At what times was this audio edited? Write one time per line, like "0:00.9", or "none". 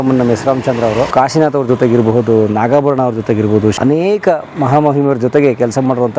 0:01.1
0:03.8